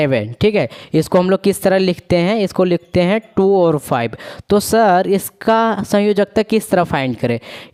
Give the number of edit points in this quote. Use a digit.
0